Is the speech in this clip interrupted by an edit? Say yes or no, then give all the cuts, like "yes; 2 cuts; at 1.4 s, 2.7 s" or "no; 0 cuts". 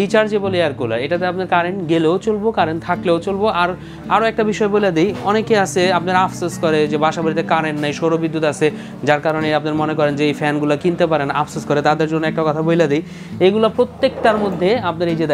no; 0 cuts